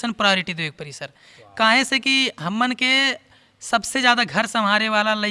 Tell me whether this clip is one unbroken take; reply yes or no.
yes